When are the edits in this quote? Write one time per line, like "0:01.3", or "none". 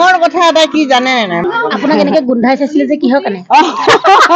0:01.4